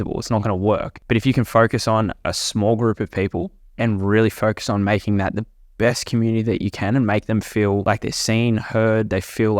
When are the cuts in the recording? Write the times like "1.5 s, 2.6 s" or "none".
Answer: 0.9 s